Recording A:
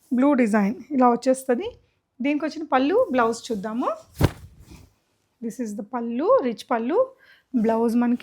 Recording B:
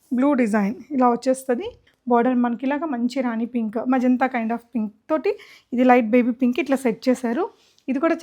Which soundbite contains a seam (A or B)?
B